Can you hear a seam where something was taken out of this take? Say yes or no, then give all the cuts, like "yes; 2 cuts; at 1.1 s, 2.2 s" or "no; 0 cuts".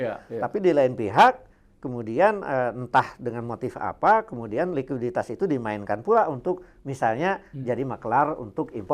no; 0 cuts